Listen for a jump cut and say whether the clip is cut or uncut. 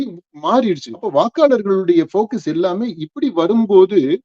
cut